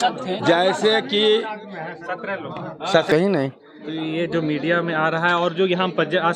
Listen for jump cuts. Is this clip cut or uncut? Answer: cut